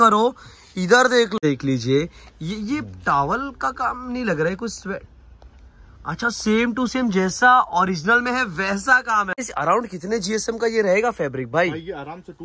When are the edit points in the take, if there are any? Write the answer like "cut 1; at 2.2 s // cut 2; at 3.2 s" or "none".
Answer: cut 1; at 1.4 s // cut 2; at 9.4 s